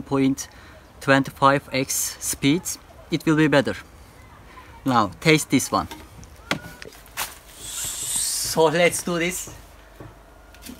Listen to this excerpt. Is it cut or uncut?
cut